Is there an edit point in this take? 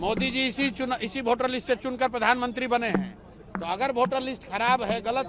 no; 0 cuts

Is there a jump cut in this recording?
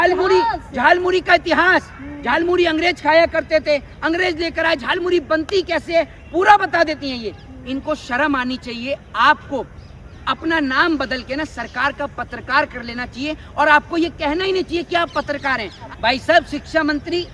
yes; 1 cut; at 15.8 s

